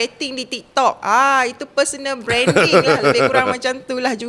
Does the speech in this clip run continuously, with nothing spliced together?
yes; 0 cuts

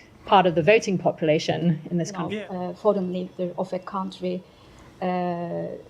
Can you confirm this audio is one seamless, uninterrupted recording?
no; 1 cut; at 2.2 s

